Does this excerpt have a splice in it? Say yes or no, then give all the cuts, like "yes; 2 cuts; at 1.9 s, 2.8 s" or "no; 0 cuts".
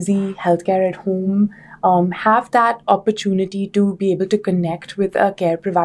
no; 0 cuts